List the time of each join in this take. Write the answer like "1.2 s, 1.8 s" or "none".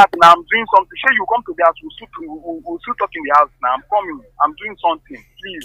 none

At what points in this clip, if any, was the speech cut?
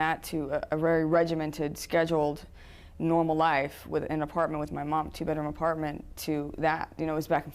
5.8 s

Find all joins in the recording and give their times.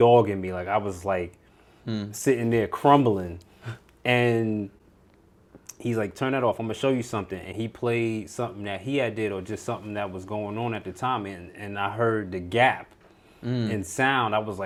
none

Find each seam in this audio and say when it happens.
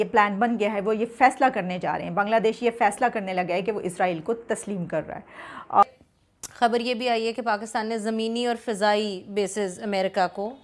5.8 s

